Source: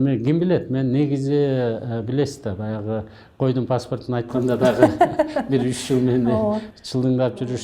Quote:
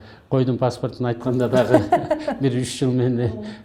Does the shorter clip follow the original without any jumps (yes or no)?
yes